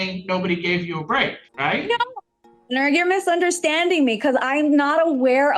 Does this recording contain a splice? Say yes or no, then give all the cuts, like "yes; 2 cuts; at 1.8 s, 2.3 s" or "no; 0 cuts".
yes; 1 cut; at 1.4 s